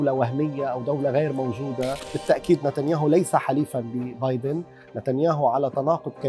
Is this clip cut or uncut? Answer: cut